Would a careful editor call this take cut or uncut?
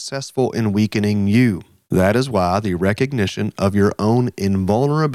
cut